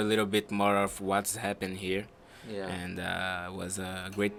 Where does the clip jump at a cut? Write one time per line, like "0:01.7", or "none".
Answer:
none